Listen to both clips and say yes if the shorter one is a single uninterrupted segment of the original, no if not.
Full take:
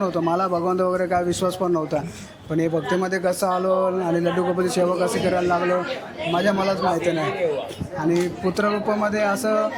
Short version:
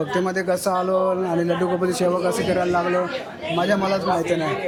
yes